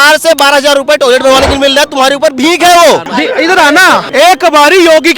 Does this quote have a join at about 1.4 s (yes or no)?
no